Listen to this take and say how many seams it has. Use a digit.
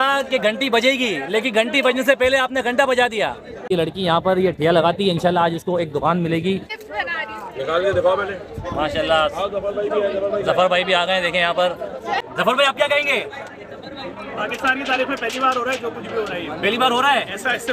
3